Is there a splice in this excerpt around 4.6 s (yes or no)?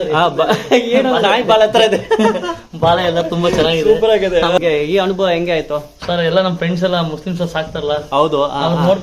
yes